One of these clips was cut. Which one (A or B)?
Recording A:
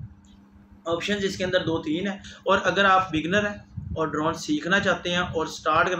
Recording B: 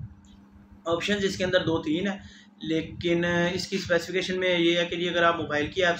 A